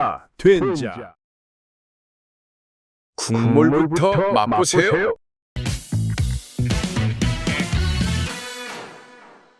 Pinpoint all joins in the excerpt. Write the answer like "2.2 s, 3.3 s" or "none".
5.6 s